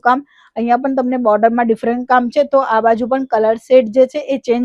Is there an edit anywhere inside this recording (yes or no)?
no